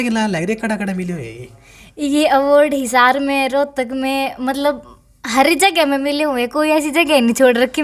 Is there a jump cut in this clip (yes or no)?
no